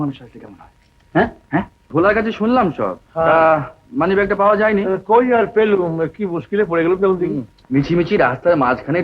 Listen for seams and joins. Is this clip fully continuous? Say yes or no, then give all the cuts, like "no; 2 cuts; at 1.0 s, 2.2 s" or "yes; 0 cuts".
no; 2 cuts; at 1.8 s, 7.5 s